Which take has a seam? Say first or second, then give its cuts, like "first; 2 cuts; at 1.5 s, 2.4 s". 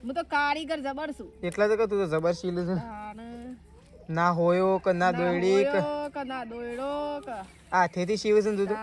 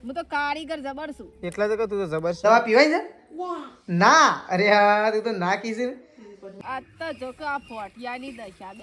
second; 2 cuts; at 2.4 s, 6.6 s